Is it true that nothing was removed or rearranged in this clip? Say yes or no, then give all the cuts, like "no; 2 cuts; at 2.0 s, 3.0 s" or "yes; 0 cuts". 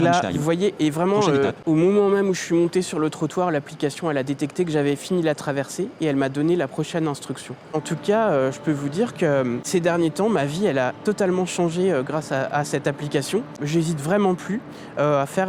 no; 4 cuts; at 1.6 s, 7.7 s, 9.7 s, 13.6 s